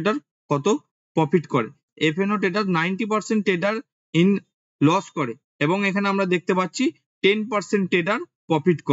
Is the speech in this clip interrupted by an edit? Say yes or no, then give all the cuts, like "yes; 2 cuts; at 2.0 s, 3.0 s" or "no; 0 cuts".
yes; 1 cut; at 1.9 s